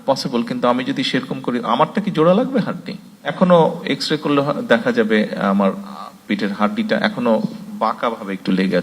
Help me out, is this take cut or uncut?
cut